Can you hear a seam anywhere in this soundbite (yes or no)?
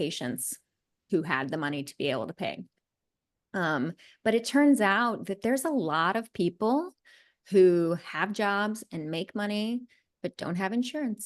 yes